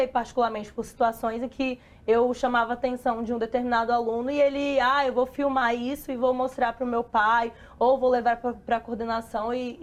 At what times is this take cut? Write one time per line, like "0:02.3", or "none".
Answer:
none